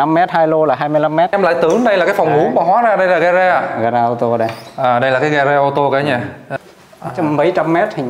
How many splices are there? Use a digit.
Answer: 2